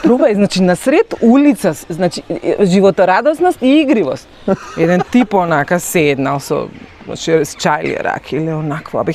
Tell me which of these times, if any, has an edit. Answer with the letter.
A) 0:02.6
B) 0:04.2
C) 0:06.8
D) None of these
D